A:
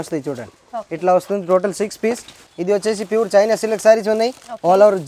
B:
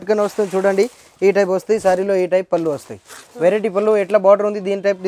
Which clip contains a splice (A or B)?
A